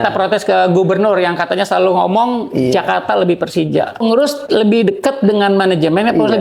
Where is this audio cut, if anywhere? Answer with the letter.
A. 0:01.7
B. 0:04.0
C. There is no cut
B